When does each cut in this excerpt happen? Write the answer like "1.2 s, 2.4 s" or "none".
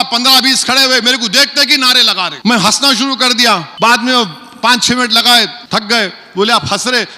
2.3 s, 3.7 s, 5.6 s